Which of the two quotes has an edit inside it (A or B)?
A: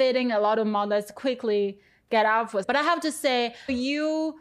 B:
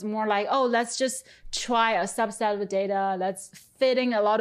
A